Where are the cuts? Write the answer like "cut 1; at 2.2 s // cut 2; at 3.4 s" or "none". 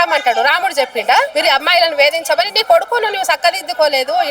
cut 1; at 1.3 s